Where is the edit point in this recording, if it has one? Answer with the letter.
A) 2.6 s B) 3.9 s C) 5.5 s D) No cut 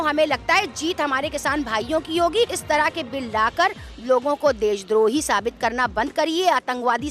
A